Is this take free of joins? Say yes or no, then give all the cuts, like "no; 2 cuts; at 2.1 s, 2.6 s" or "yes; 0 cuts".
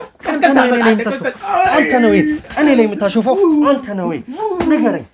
yes; 0 cuts